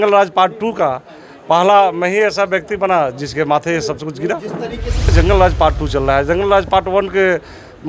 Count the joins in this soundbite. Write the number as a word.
one